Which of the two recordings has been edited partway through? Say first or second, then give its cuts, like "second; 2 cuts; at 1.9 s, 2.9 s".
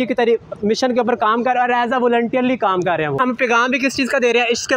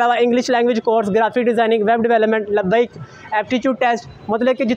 first; 1 cut; at 3.2 s